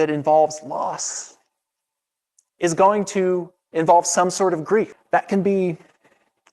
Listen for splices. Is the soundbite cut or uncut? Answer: cut